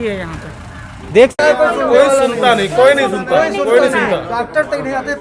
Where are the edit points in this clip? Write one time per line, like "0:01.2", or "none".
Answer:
0:01.3